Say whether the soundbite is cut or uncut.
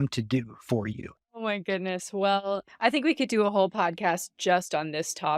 cut